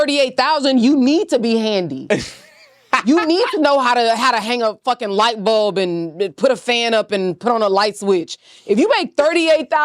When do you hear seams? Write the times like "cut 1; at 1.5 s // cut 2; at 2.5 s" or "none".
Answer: none